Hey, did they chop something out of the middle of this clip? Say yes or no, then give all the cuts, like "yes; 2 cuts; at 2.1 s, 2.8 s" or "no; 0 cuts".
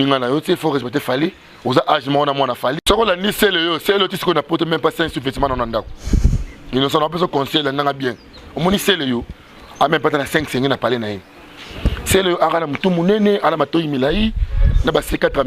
no; 0 cuts